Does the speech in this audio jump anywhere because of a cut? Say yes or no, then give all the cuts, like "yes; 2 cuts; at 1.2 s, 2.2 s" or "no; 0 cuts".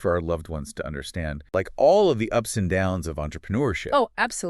yes; 1 cut; at 1.5 s